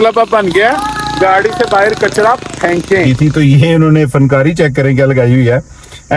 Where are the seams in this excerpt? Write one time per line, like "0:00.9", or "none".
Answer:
0:03.1